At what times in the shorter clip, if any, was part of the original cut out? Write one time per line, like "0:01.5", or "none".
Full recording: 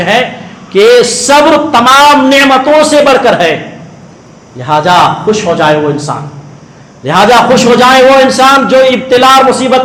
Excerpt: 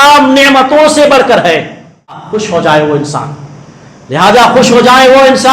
0:02.3